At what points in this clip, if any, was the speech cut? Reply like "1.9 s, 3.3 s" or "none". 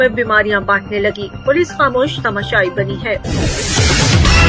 3.2 s